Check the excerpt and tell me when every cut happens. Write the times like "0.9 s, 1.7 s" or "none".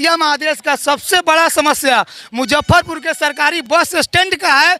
none